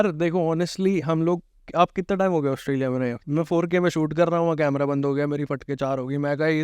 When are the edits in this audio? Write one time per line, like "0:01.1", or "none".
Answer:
0:03.2